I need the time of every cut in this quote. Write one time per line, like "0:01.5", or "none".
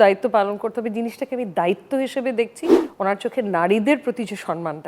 0:02.8